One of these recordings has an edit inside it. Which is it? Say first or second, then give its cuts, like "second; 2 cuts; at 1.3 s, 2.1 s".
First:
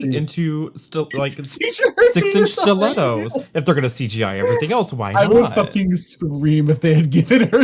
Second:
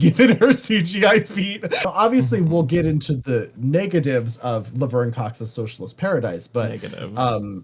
second; 1 cut; at 1.8 s